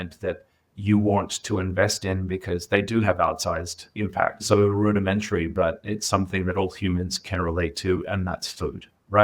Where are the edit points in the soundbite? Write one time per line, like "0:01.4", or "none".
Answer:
0:04.4